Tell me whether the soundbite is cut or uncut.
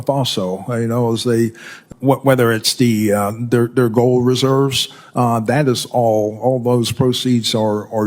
cut